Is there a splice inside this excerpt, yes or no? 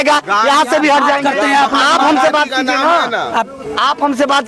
no